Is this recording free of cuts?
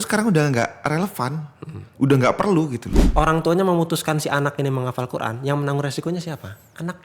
no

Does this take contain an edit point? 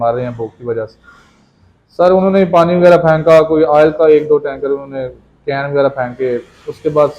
no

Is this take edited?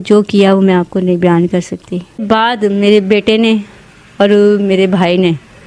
yes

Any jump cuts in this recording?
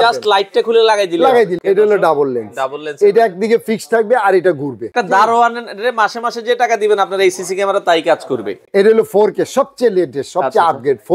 yes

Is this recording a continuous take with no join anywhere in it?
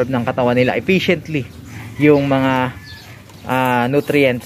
yes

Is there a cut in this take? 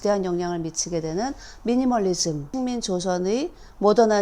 yes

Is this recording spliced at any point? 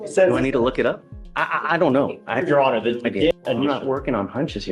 yes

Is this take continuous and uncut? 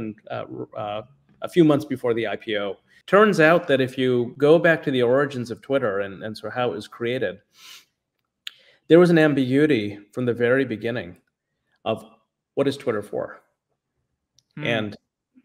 no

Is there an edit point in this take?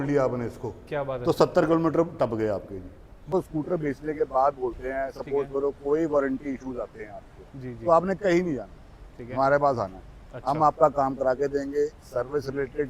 yes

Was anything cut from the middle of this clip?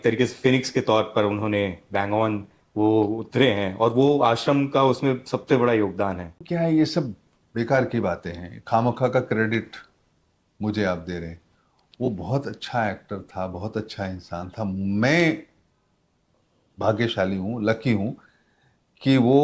yes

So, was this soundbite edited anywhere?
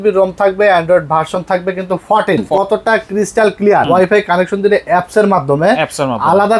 yes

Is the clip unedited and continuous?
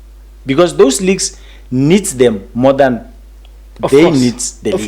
yes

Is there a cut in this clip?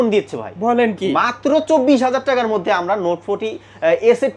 no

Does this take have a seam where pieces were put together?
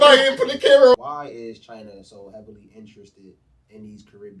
yes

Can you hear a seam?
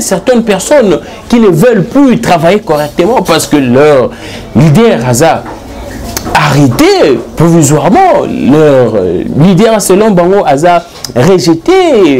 no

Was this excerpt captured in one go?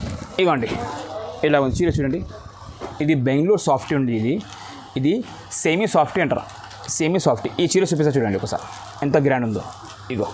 yes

